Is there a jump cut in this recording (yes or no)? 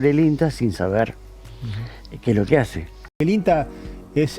yes